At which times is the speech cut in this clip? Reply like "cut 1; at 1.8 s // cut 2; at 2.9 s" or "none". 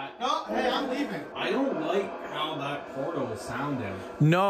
cut 1; at 1.3 s